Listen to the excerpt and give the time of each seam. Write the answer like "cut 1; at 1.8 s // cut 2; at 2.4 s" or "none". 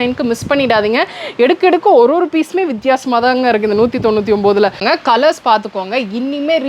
cut 1; at 4.8 s